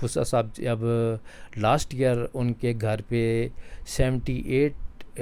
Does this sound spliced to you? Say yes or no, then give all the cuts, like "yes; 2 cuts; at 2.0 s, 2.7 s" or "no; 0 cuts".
no; 0 cuts